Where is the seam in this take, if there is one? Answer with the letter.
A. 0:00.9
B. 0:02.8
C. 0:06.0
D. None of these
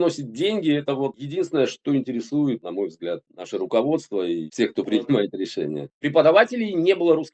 C